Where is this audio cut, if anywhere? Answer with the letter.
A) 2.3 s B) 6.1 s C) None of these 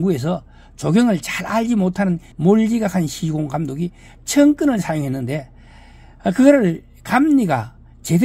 A